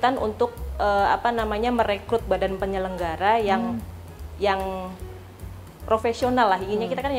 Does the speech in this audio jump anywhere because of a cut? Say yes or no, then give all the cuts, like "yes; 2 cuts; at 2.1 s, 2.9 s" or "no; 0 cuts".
no; 0 cuts